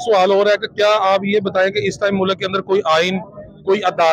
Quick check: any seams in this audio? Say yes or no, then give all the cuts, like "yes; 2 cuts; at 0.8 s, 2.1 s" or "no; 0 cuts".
no; 0 cuts